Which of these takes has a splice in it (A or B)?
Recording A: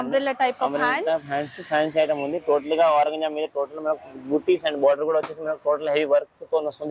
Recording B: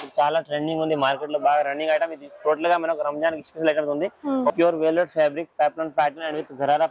B